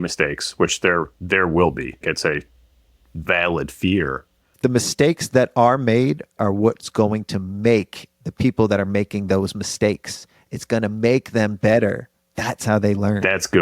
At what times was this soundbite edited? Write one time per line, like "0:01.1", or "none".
0:02.0
0:04.5
0:06.4